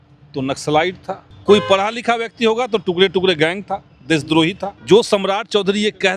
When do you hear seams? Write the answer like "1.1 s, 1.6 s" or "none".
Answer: 1.3 s, 4.7 s